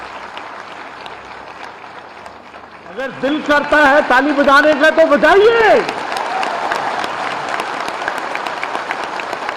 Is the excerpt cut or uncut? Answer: cut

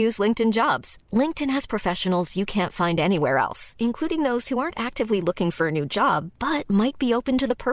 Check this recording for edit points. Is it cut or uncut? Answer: uncut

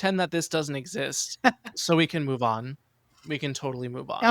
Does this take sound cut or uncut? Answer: cut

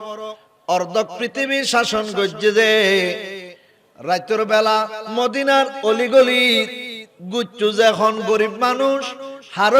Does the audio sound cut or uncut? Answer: cut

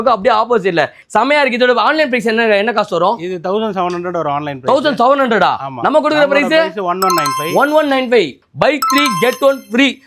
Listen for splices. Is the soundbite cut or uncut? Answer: cut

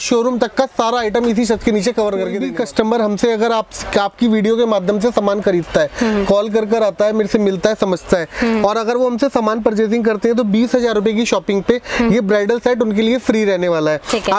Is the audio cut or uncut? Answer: cut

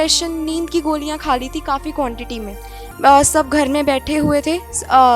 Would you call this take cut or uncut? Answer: uncut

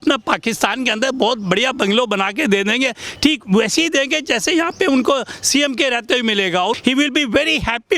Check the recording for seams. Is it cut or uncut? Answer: cut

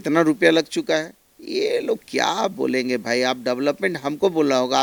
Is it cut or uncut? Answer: uncut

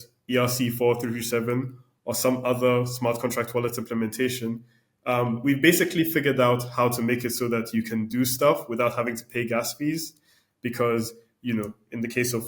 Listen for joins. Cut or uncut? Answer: uncut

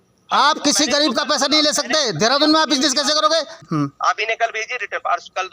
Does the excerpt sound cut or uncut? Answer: cut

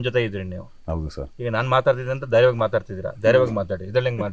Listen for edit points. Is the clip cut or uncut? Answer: uncut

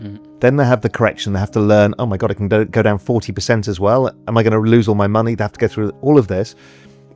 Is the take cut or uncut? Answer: uncut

